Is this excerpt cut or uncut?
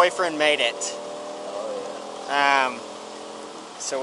uncut